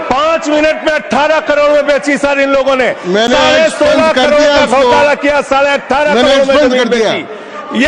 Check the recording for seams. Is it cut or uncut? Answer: uncut